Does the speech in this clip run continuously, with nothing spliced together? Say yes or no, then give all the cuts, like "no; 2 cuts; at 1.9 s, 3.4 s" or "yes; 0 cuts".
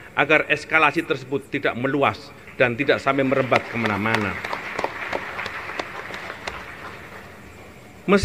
yes; 0 cuts